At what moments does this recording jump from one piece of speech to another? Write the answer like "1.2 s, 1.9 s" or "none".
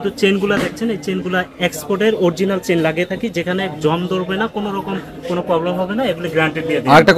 none